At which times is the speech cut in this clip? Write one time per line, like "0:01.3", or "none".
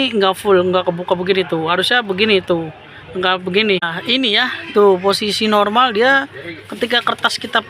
0:03.9